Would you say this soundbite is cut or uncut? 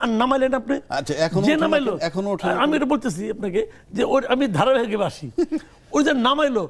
uncut